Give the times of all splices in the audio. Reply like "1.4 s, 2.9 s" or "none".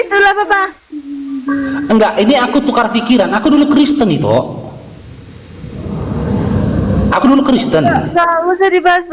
1.4 s